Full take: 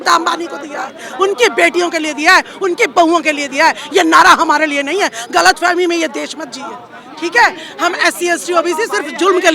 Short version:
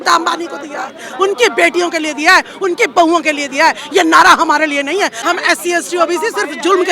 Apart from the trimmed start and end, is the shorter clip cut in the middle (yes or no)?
yes